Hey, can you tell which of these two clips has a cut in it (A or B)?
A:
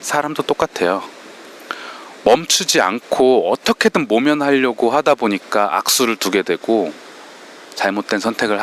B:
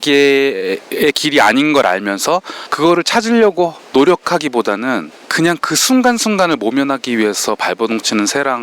B